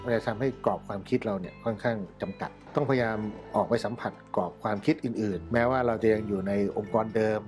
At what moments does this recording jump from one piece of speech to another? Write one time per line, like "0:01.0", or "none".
0:02.5
0:05.4

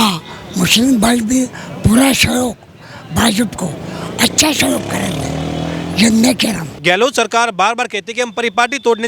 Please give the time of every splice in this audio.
0:06.7

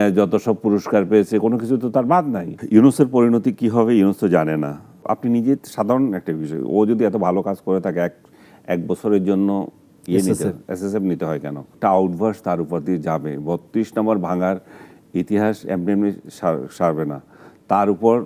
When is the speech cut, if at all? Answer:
0:02.5
0:05.0
0:11.7

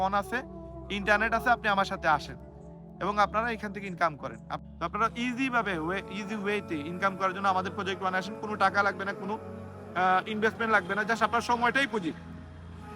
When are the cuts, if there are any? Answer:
0:04.5

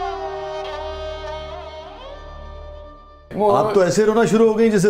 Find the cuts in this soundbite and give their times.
none

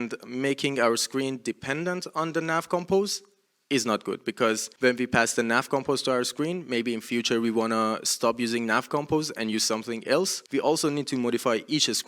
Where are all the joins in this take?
0:04.7
0:10.4

